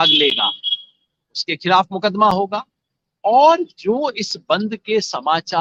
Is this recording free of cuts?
yes; 0 cuts

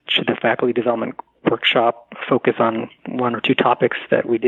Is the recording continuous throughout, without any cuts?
yes; 0 cuts

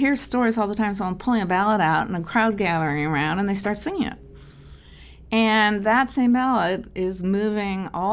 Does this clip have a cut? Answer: no; 0 cuts

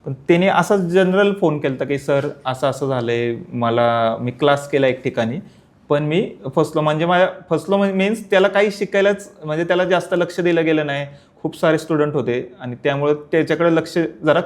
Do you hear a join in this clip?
no; 0 cuts

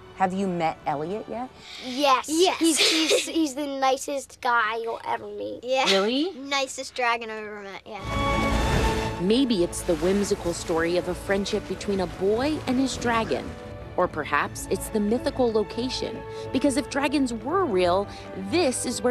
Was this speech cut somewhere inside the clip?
yes; 1 cut; at 3.5 s

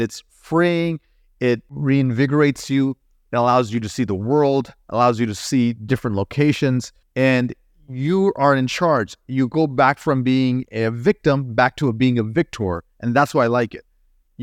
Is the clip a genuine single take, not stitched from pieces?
no; 2 cuts; at 1.7 s, 7.0 s

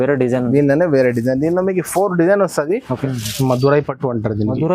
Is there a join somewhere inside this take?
yes; 1 cut; at 3.0 s

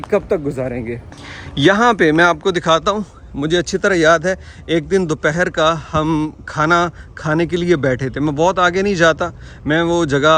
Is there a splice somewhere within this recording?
no; 0 cuts

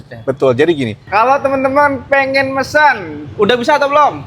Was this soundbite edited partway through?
yes; 1 cut; at 0.9 s

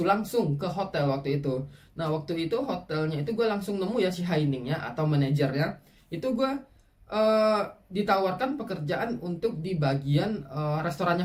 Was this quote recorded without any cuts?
yes; 0 cuts

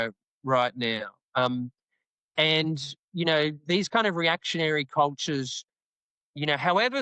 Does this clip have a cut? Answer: no; 0 cuts

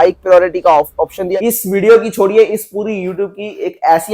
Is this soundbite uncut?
no; 1 cut; at 1.2 s

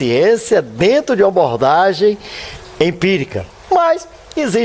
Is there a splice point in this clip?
no; 0 cuts

